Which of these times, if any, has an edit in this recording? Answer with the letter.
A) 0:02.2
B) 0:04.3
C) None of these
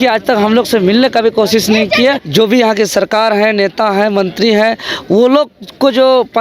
A